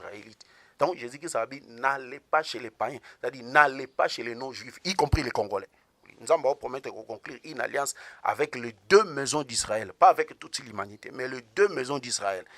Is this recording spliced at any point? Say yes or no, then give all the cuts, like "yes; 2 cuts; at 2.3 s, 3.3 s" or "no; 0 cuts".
yes; 1 cut; at 6.1 s